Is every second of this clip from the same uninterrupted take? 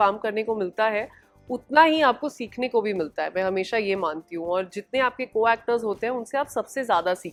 yes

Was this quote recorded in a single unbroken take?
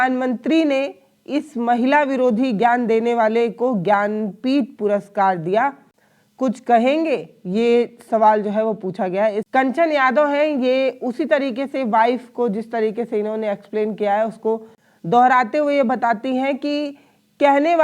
yes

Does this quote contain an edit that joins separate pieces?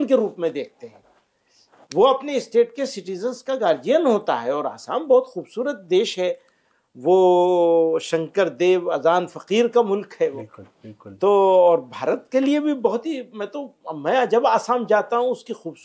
no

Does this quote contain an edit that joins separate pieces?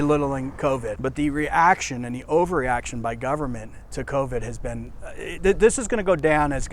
yes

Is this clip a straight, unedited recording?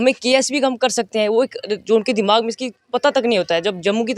yes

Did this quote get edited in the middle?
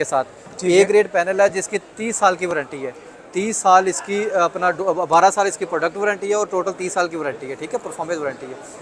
no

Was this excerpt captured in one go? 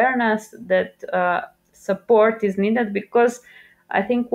yes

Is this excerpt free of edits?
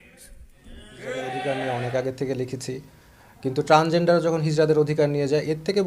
no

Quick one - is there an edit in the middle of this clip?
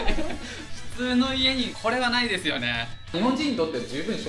yes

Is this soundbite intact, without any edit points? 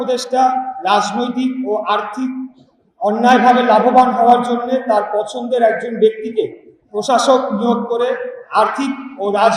yes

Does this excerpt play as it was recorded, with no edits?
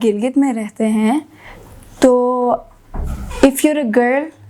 yes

